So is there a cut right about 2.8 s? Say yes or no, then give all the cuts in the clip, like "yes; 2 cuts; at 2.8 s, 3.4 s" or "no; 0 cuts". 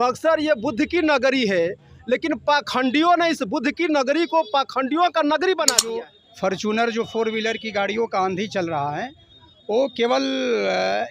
no; 1 cut; at 5.9 s